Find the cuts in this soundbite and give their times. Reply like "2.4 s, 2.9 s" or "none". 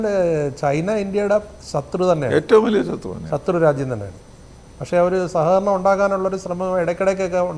none